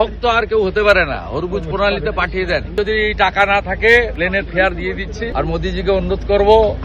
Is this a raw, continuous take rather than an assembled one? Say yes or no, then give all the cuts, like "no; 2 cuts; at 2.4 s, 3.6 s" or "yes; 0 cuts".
no; 3 cuts; at 2.7 s, 4.1 s, 5.3 s